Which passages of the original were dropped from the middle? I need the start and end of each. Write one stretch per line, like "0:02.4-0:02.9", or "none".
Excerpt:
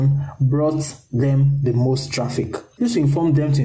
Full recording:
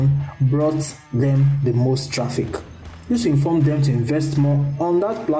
0:02.6-0:02.9